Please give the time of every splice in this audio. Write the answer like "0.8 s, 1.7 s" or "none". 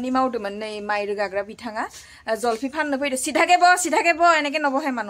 none